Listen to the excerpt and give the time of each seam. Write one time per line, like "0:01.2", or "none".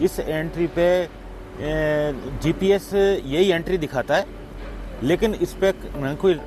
none